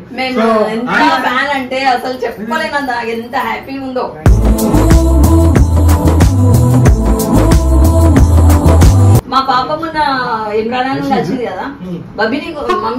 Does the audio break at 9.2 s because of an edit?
yes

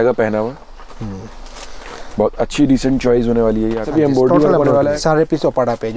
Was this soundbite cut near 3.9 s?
yes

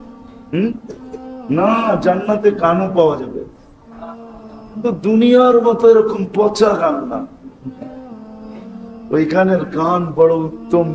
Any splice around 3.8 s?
no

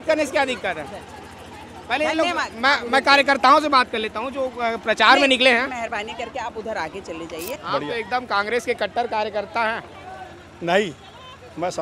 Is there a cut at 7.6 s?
yes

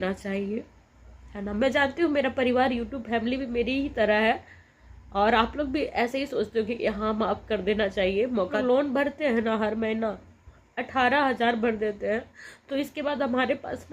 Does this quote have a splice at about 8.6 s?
yes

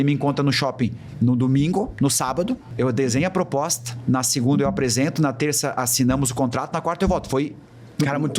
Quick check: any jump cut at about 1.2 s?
no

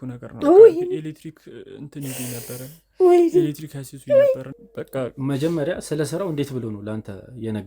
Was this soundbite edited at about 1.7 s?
no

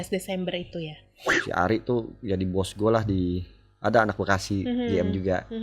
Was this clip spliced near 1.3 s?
yes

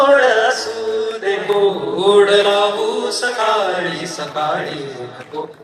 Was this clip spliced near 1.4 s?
yes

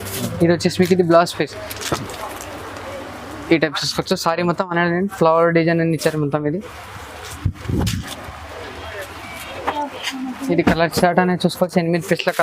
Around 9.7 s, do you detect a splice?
yes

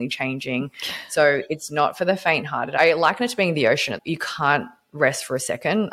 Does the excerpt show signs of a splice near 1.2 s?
no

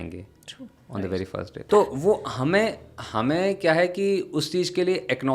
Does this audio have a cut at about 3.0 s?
no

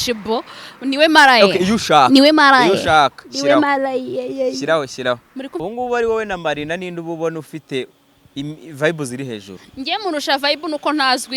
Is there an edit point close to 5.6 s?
yes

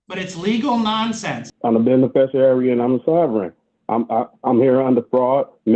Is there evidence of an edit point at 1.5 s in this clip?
yes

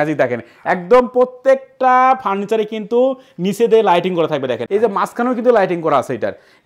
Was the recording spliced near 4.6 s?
yes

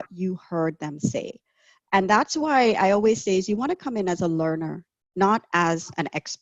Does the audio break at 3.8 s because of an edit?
no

